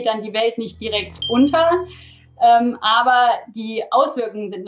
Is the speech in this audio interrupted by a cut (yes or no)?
no